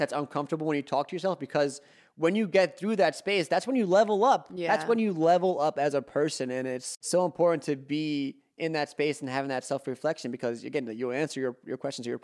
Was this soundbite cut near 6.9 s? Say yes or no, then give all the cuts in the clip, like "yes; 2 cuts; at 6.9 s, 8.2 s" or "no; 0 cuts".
yes; 1 cut; at 6.9 s